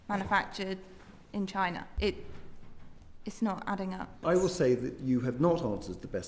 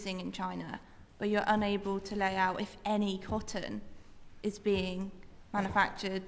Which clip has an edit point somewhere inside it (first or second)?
first